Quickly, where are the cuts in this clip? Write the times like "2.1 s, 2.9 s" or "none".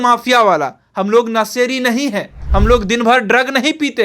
2.4 s